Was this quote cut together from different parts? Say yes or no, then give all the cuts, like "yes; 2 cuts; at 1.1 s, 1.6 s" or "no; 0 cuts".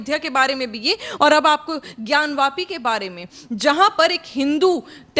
no; 0 cuts